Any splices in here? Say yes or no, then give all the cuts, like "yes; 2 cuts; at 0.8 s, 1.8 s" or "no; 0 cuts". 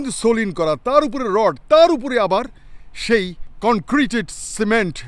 yes; 1 cut; at 3.4 s